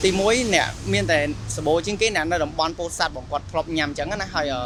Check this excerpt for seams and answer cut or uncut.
uncut